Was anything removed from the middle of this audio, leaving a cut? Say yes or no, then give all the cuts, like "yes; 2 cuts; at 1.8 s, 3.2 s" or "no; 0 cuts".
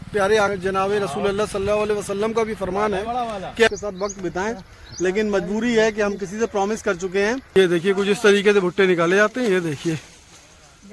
yes; 2 cuts; at 3.7 s, 7.5 s